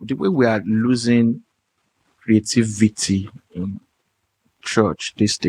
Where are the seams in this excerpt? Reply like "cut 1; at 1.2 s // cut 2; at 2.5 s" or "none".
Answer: none